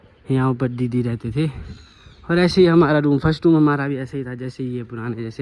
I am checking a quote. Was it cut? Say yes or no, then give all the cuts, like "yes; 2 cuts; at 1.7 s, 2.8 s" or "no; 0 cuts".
no; 0 cuts